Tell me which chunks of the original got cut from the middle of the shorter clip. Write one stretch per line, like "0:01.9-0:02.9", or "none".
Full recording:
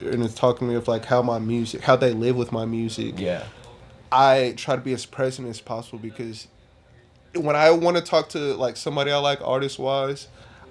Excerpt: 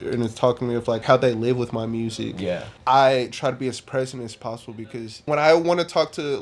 0:01.0-0:01.8
0:03.5-0:04.0
0:06.5-0:07.4